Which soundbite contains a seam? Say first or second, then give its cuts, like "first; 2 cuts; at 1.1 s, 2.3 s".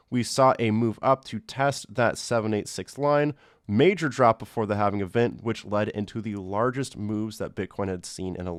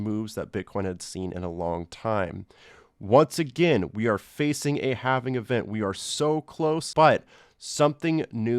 second; 1 cut; at 6.9 s